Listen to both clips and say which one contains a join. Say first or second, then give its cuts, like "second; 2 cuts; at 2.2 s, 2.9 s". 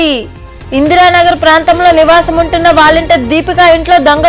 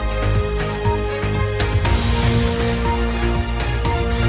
second; 1 cut; at 1.7 s